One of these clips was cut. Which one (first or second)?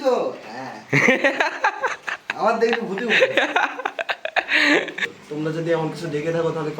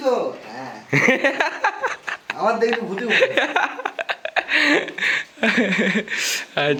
first